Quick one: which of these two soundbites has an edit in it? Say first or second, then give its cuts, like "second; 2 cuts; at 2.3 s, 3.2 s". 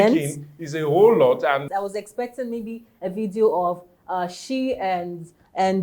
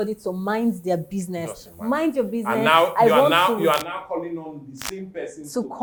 first; 1 cut; at 1.6 s